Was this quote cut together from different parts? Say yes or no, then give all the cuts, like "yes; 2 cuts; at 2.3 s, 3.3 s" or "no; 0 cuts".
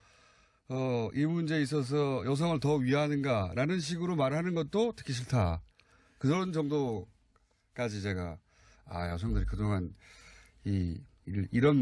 yes; 1 cut; at 9.5 s